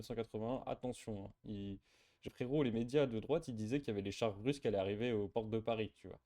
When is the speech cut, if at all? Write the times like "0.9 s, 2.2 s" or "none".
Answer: 2.2 s